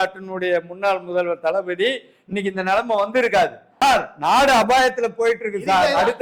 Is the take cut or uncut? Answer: cut